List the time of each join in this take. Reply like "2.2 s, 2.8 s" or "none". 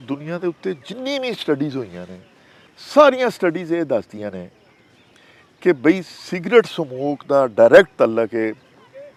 none

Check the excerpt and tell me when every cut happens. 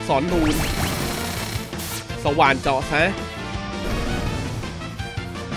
none

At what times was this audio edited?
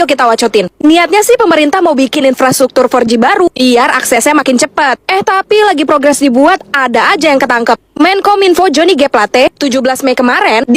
none

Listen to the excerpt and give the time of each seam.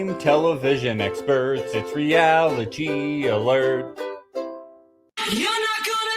5.1 s

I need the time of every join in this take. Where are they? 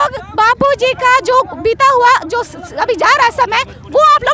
none

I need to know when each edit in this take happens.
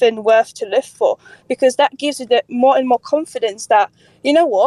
none

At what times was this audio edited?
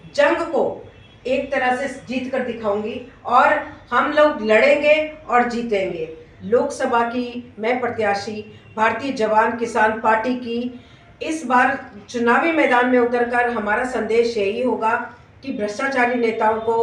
6.3 s

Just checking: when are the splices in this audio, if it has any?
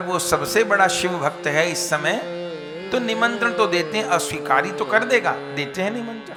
none

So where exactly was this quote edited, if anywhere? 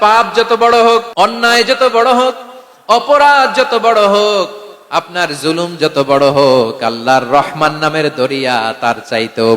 1.1 s

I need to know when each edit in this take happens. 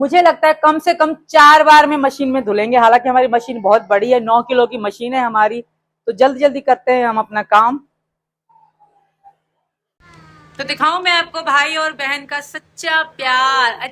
none

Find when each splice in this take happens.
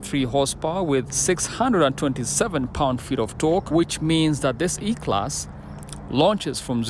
1.1 s, 3.7 s

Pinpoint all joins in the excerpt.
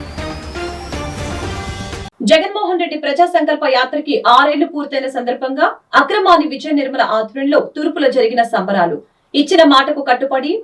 2.1 s

